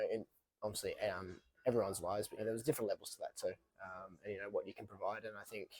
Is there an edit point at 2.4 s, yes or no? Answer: yes